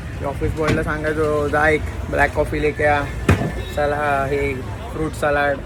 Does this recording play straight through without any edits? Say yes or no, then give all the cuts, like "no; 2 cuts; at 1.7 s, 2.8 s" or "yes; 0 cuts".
yes; 0 cuts